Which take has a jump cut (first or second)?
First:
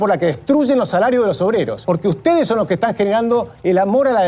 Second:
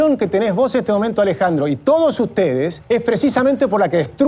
first